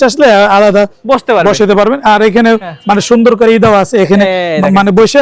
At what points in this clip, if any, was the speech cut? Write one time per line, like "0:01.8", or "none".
none